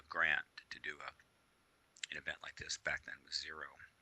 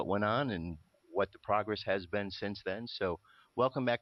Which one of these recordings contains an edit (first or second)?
first